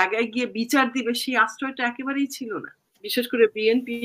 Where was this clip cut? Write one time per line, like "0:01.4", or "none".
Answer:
0:02.9